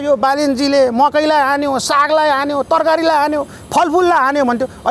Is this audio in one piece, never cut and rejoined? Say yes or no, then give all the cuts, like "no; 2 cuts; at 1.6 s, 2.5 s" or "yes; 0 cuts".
yes; 0 cuts